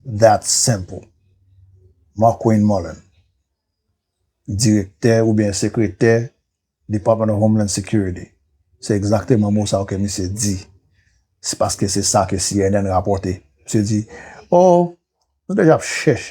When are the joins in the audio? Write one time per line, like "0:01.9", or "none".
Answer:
none